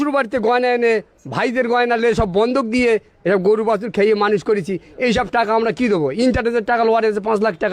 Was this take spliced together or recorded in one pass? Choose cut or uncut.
uncut